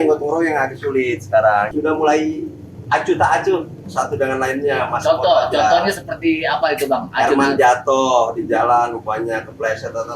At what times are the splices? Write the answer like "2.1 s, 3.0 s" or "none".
1.7 s